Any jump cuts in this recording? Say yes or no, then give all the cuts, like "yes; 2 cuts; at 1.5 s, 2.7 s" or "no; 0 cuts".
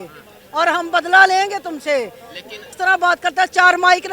yes; 1 cut; at 2.7 s